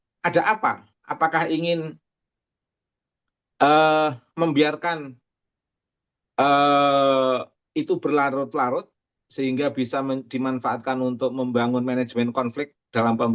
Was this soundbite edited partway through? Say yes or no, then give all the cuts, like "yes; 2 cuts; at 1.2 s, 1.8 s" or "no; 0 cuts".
no; 0 cuts